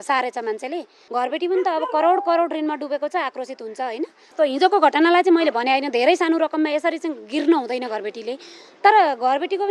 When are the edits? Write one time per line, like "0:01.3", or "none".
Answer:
0:00.9
0:04.3